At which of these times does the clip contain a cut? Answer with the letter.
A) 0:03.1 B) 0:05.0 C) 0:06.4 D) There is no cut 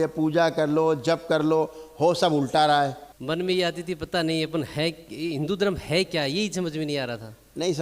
A